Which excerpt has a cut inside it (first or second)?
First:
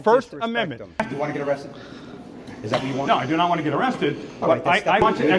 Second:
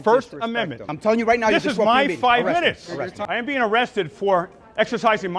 second